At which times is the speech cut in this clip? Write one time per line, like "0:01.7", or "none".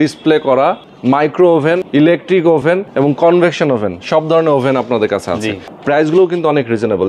0:00.9
0:01.8
0:02.7
0:05.7